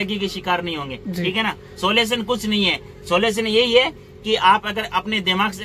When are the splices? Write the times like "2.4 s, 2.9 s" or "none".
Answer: none